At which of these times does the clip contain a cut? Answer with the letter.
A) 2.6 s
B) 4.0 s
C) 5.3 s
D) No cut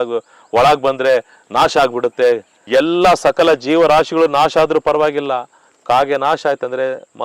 A